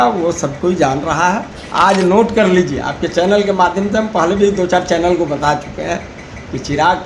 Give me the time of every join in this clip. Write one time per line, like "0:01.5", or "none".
0:01.6

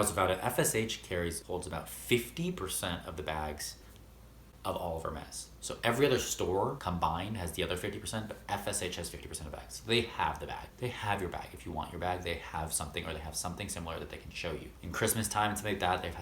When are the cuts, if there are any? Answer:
none

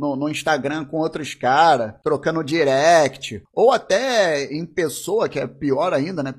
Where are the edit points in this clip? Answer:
0:02.0

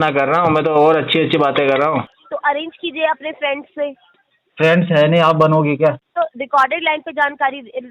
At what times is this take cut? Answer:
0:02.2
0:06.0

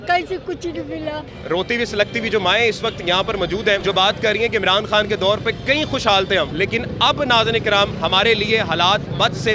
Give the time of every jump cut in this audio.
0:01.3
0:03.8
0:06.5

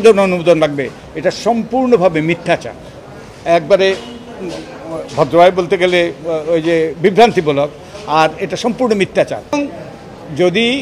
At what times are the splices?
0:09.4

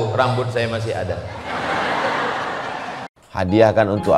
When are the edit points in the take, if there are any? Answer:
0:03.1

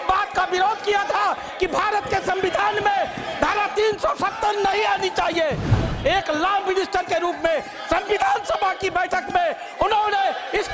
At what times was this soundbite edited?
0:05.8

